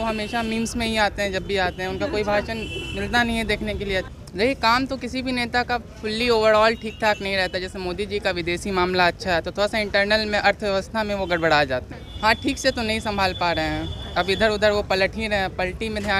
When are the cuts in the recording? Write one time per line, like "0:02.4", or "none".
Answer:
0:04.1
0:12.0